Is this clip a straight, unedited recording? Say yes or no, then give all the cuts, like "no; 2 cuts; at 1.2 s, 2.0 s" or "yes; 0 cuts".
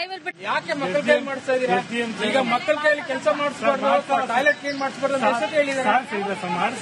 yes; 0 cuts